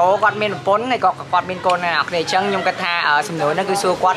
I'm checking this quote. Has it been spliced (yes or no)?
no